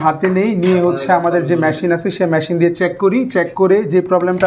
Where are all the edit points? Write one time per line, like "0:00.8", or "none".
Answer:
none